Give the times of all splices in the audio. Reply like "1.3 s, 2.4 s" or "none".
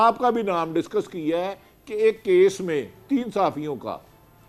none